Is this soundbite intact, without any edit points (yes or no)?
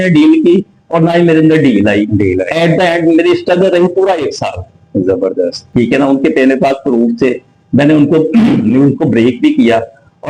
yes